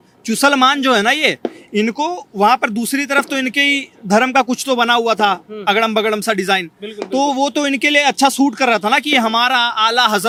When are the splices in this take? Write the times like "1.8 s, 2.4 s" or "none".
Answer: none